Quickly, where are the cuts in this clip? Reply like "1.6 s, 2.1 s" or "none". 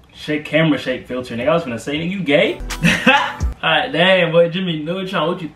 2.6 s